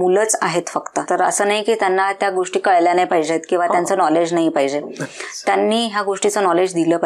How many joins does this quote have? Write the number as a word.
one